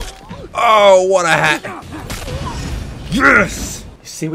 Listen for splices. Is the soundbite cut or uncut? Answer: cut